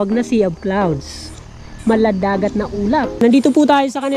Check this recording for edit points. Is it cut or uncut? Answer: cut